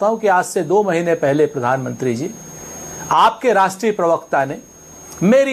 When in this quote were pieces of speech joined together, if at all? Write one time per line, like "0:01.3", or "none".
none